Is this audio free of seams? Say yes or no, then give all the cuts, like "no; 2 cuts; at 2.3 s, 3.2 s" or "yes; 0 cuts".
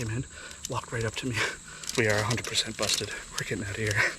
no; 1 cut; at 1.9 s